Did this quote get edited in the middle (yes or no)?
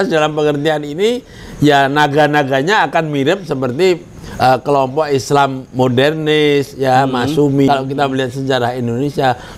yes